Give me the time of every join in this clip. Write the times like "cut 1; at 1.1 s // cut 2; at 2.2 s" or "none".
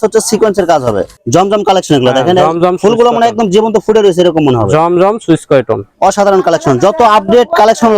cut 1; at 1.1 s // cut 2; at 5.9 s